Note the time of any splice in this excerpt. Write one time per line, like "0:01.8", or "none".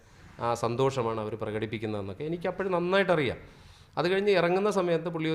none